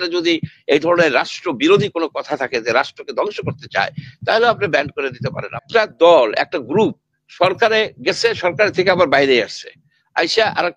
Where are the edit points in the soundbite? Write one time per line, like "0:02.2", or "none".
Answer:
0:05.5